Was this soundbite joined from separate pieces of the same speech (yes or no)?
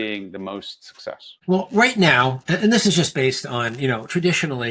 no